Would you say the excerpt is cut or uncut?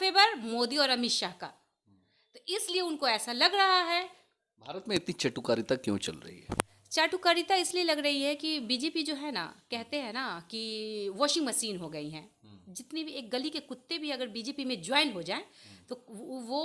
uncut